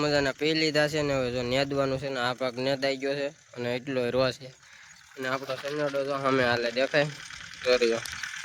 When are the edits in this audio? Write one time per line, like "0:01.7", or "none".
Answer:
none